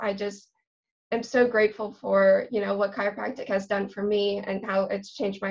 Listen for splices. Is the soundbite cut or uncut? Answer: uncut